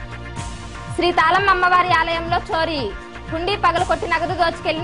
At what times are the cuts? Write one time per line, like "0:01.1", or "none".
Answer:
0:01.0